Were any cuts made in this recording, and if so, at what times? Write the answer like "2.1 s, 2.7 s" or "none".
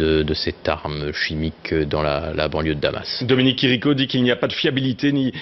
3.1 s

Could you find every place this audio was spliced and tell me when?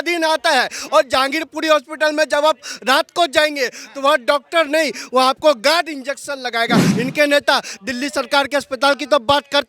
6.9 s

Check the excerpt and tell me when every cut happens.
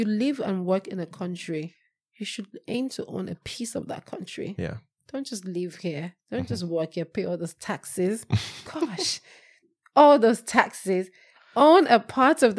none

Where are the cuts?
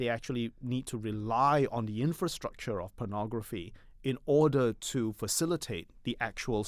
none

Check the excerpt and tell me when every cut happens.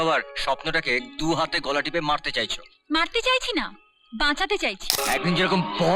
5.0 s

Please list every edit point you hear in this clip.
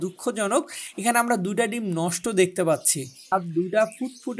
3.3 s

